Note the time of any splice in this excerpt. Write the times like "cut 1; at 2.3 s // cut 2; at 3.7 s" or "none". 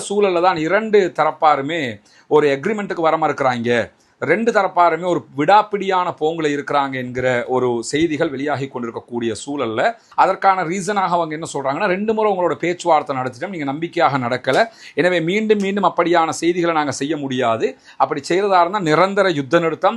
cut 1; at 10.0 s

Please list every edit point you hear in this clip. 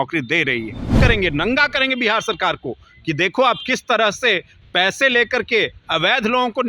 cut 1; at 1.0 s

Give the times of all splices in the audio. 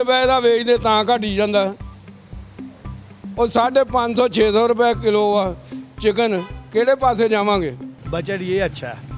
cut 1; at 7.9 s

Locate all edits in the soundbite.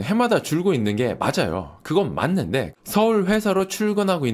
cut 1; at 2.7 s

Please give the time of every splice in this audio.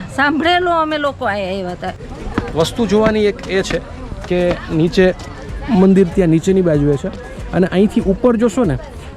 cut 1; at 2.0 s

